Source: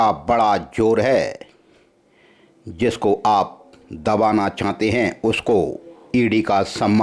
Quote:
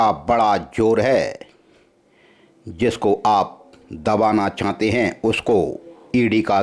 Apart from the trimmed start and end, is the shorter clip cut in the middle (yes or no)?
no